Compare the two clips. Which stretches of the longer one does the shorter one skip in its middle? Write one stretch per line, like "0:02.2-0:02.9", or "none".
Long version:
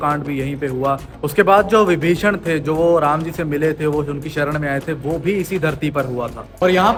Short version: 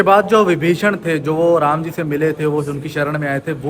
none